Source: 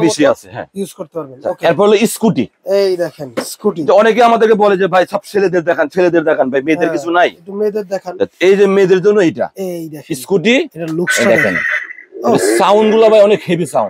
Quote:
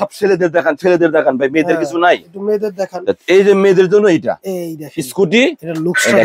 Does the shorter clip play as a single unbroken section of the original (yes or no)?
yes